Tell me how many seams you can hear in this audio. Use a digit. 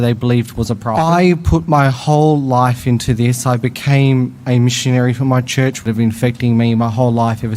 2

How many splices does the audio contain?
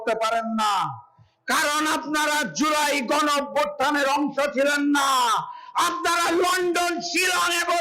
0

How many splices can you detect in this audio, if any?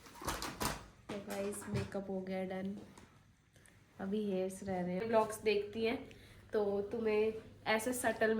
1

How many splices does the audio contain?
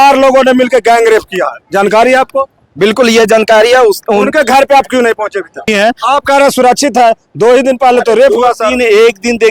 1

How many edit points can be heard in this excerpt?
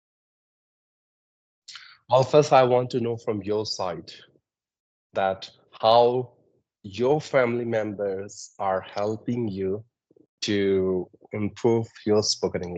0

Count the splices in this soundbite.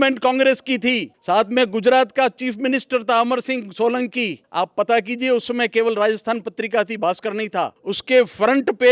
3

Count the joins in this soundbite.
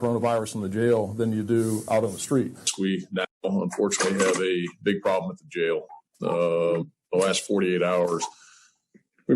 2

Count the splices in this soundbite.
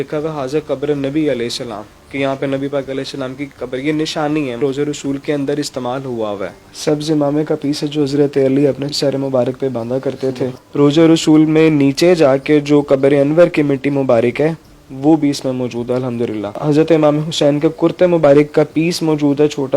5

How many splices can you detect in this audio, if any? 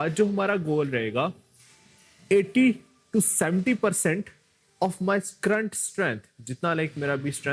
0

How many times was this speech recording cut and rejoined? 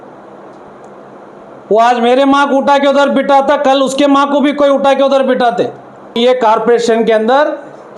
1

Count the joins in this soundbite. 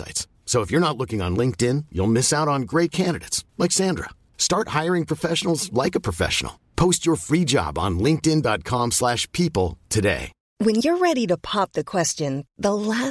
1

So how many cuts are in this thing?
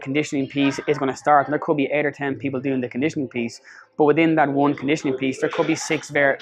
0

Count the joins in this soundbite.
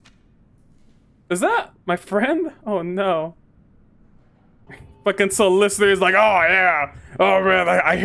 1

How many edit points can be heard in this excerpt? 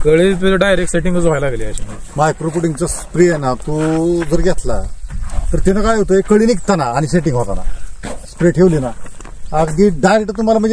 0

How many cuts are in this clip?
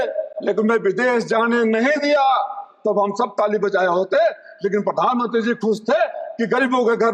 0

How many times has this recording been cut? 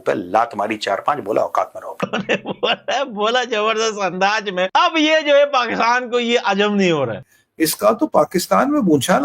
2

